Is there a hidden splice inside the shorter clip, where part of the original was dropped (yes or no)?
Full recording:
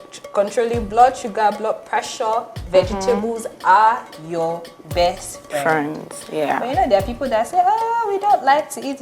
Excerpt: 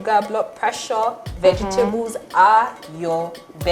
no